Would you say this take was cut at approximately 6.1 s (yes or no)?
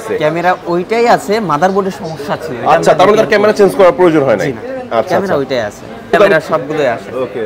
yes